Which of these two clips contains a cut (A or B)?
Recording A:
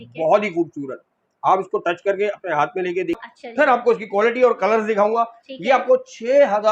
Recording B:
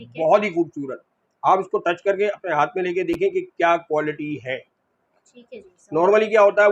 A